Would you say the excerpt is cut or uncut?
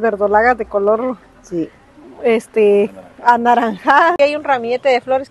cut